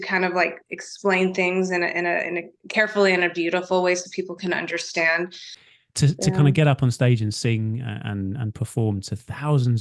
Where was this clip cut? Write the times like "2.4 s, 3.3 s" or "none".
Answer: 5.5 s